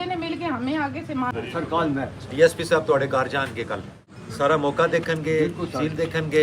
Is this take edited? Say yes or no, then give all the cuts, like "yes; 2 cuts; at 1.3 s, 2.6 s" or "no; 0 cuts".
yes; 2 cuts; at 1.2 s, 4.0 s